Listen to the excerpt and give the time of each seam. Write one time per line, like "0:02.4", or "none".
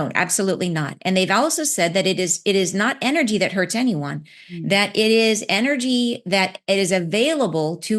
none